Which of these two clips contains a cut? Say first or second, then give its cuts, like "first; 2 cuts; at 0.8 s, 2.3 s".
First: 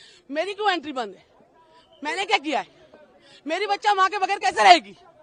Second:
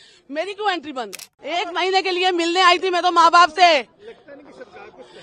second; 1 cut; at 1.3 s